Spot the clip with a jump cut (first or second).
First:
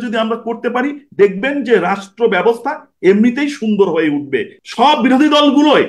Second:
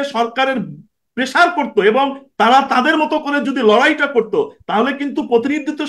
first